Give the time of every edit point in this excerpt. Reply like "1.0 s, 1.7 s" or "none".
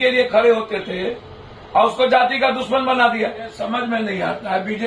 3.6 s